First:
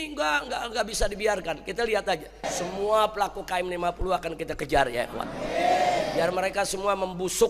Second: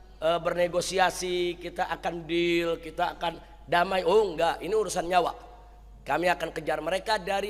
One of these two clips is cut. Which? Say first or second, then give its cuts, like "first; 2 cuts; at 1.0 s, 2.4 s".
first; 1 cut; at 2.5 s